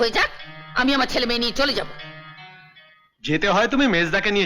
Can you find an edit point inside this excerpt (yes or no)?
no